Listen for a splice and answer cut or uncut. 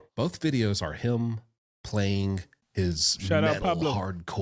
uncut